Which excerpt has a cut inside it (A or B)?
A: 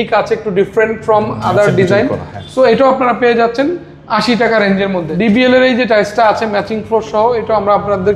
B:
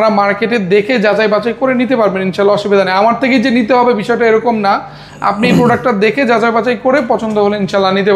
A